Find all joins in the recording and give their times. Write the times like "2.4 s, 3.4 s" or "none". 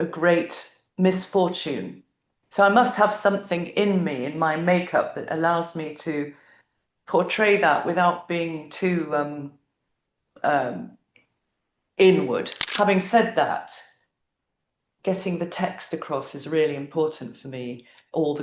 12.6 s